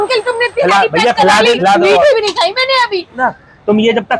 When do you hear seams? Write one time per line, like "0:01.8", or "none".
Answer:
0:01.6
0:03.2

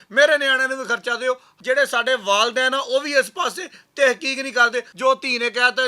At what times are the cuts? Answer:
0:01.5
0:04.9

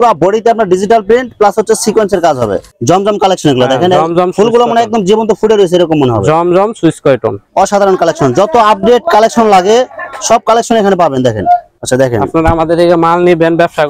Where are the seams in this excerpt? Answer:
0:02.7
0:07.4
0:11.7

